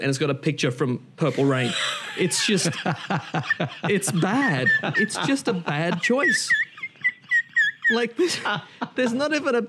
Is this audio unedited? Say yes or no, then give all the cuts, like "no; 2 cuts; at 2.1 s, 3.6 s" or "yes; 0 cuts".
yes; 0 cuts